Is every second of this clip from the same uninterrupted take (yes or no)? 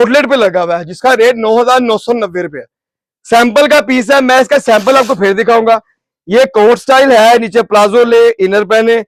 yes